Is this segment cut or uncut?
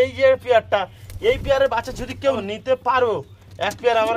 cut